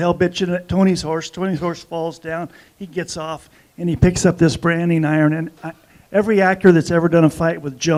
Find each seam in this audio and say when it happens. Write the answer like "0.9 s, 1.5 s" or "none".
none